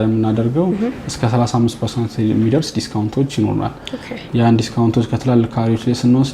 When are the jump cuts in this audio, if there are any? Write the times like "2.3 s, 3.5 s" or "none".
none